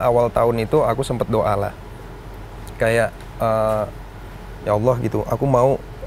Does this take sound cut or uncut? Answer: uncut